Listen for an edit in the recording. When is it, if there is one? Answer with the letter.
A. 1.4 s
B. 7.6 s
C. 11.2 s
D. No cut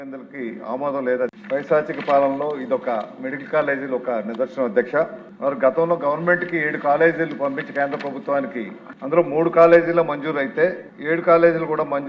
A